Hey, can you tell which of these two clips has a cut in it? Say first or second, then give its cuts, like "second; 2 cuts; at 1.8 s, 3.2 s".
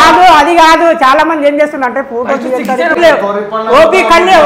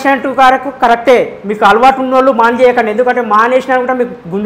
first; 1 cut; at 3.0 s